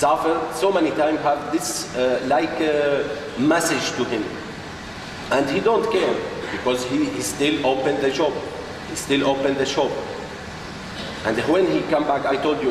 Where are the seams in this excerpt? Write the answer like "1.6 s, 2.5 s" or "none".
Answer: 10.3 s